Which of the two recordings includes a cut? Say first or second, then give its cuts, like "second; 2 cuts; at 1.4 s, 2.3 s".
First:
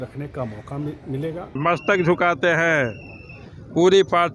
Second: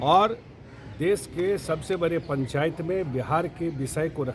first; 1 cut; at 1.6 s